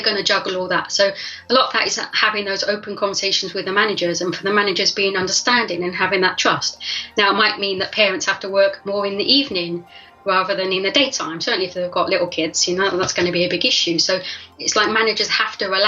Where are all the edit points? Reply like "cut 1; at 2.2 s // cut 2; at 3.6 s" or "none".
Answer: cut 1; at 14.4 s